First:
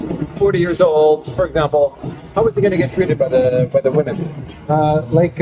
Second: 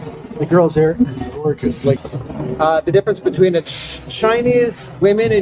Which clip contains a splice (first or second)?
second